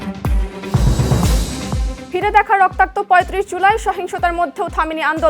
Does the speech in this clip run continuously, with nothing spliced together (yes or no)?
no